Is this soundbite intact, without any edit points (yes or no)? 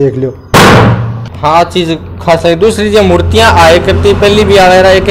yes